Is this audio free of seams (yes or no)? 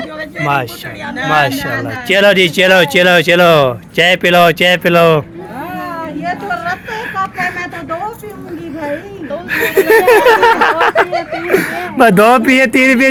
yes